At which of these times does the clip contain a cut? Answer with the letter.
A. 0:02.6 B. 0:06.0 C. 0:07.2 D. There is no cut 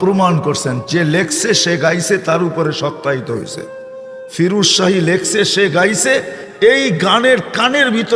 B